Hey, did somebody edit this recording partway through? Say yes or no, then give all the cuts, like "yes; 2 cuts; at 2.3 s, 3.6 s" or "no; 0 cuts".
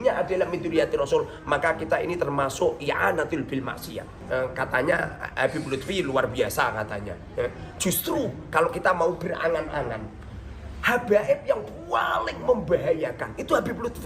yes; 1 cut; at 4.1 s